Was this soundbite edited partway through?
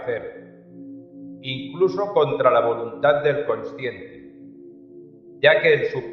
no; 0 cuts

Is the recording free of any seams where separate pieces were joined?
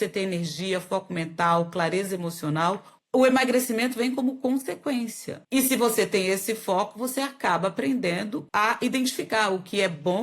no; 2 cuts; at 5.4 s, 8.4 s

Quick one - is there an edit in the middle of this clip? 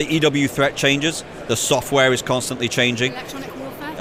no; 0 cuts

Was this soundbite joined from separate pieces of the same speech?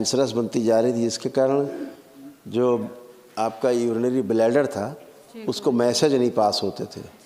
no; 0 cuts

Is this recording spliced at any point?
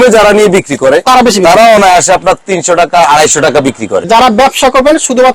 yes; 1 cut; at 4.1 s

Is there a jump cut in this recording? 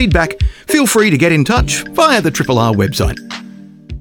yes; 1 cut; at 3.1 s

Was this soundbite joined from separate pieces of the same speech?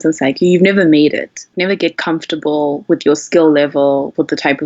yes; 1 cut; at 1.5 s

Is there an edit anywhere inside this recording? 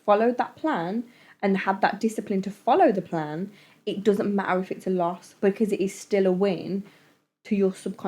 no; 0 cuts

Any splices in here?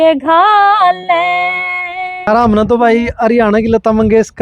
yes; 1 cut; at 2.2 s

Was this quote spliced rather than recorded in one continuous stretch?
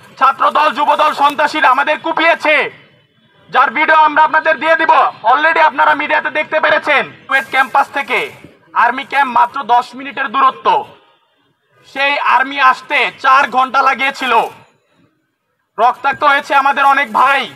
yes; 1 cut; at 7.2 s

